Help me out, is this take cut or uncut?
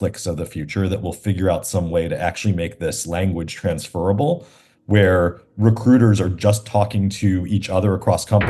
uncut